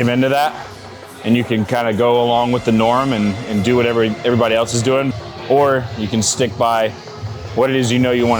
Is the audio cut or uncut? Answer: cut